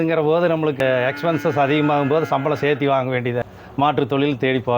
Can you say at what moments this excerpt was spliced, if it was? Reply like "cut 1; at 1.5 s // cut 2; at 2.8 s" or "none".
cut 1; at 0.8 s // cut 2; at 3.7 s